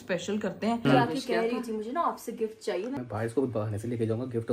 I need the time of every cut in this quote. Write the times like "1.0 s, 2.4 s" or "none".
0.8 s, 3.0 s